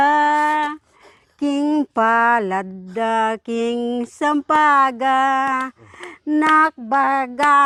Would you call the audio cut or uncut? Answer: uncut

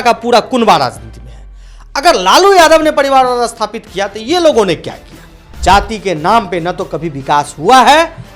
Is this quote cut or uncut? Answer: cut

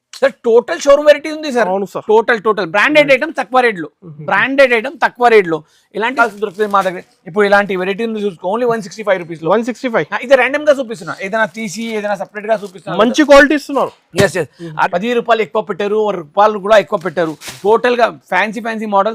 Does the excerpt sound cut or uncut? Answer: cut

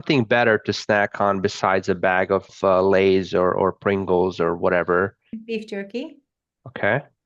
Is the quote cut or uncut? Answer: cut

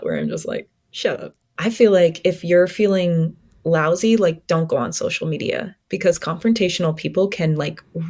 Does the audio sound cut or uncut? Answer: cut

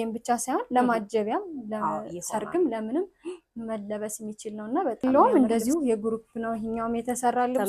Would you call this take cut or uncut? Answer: cut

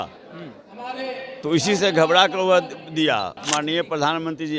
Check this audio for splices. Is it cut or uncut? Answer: cut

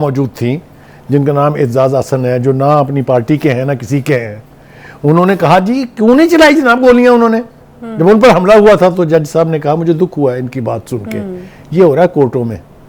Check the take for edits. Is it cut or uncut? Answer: uncut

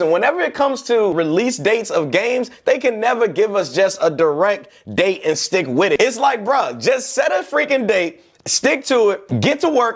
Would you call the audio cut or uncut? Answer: cut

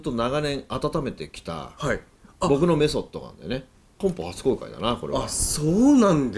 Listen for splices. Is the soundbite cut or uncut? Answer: uncut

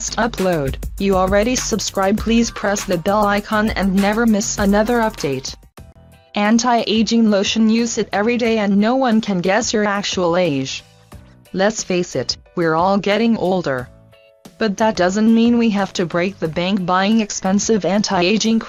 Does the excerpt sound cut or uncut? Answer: uncut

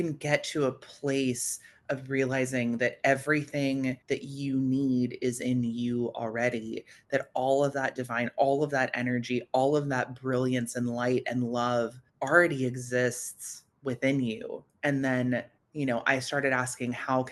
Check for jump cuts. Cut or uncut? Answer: uncut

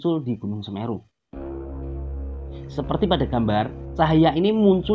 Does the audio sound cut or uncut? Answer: uncut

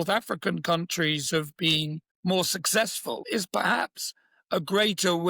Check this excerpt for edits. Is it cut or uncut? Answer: cut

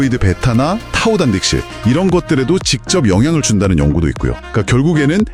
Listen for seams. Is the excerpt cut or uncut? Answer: uncut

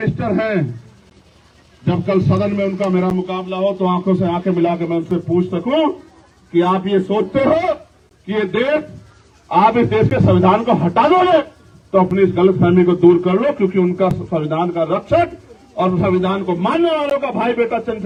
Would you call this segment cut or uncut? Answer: uncut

